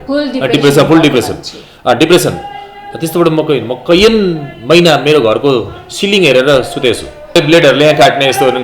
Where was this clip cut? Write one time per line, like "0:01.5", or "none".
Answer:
0:07.3

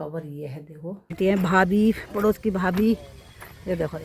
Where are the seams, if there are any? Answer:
0:01.2

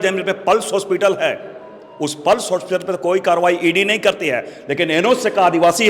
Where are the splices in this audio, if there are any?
none

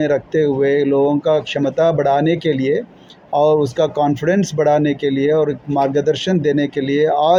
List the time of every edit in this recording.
none

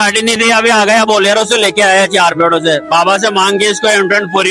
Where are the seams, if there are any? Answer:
none

